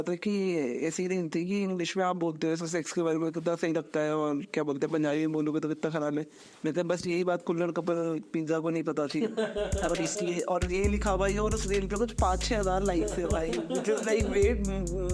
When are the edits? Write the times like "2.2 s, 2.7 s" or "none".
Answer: none